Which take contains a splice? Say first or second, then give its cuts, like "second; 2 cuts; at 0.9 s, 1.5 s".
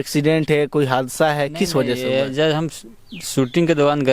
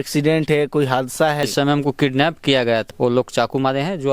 second; 2 cuts; at 1.5 s, 2.9 s